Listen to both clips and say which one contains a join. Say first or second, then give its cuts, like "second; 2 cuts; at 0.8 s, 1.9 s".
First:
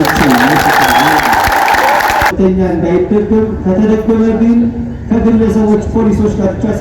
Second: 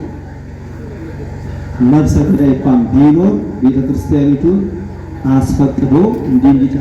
first; 1 cut; at 2.3 s